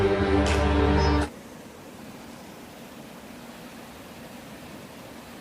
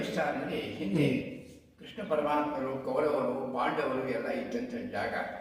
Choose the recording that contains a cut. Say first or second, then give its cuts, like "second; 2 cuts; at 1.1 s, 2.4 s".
first; 1 cut; at 1.2 s